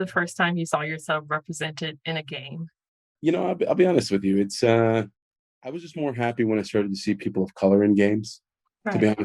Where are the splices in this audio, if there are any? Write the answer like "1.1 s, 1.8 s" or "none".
3.1 s, 5.9 s